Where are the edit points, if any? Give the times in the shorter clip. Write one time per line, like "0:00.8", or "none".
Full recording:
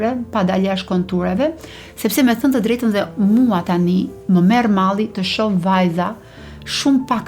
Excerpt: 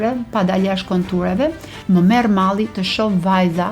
0:01.8